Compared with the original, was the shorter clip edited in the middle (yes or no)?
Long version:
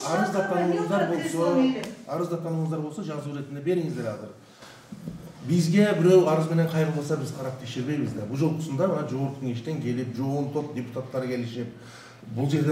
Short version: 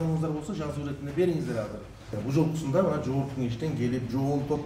yes